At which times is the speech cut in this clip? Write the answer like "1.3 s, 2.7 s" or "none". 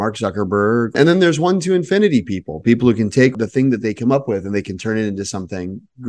3.3 s